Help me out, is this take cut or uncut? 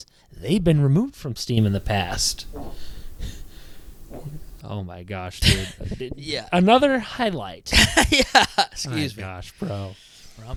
uncut